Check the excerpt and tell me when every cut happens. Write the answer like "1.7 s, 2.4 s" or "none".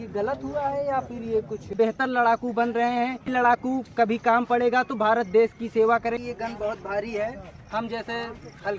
1.7 s, 3.3 s, 6.2 s